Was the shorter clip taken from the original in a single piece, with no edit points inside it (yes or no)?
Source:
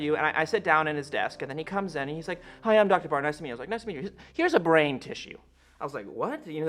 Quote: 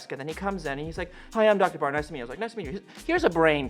yes